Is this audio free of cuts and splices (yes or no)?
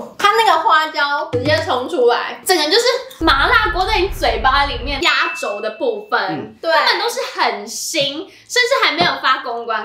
no